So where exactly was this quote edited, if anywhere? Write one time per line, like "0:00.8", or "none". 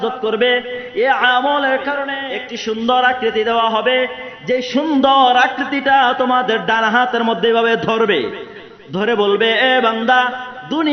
0:02.1